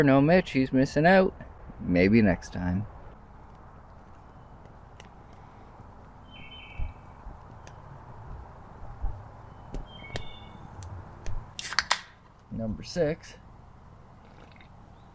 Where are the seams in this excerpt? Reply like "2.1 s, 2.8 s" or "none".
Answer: 3.2 s, 11.5 s